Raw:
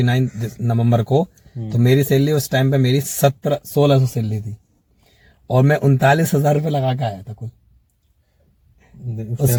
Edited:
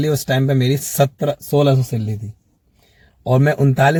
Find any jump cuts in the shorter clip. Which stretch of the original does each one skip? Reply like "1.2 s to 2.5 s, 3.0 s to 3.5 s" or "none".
none